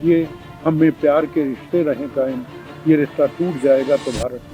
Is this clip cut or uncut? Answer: uncut